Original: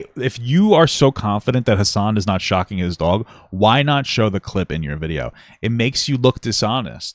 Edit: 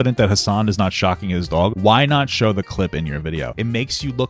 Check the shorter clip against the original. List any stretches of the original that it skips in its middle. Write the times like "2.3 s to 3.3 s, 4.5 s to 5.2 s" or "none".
3.2 s to 3.5 s, 5.3 s to 5.6 s